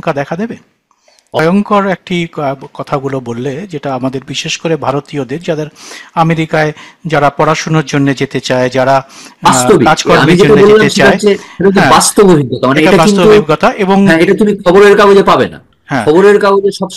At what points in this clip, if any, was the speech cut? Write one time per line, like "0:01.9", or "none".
0:01.4